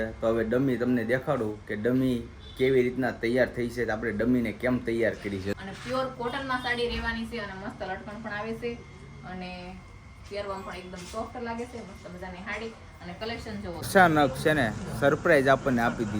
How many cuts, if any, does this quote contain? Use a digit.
2